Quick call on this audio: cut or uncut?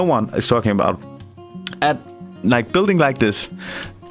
uncut